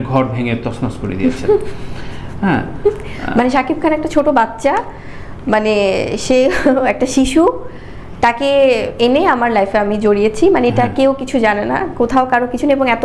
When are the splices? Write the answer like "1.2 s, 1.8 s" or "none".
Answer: none